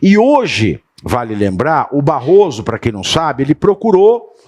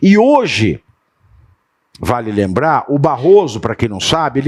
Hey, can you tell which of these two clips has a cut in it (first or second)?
first